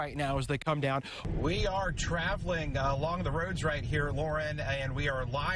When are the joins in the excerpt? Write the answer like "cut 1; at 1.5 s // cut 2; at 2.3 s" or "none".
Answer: cut 1; at 1.1 s